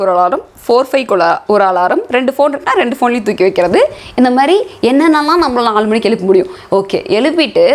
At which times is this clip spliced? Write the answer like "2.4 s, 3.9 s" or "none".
none